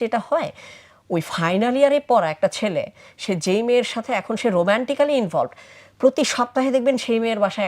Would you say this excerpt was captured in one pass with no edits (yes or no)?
yes